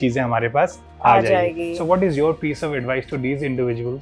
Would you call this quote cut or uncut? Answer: uncut